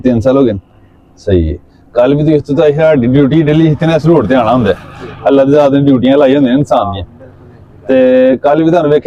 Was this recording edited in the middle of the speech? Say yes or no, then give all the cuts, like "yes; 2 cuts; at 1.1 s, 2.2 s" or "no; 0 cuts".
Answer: no; 0 cuts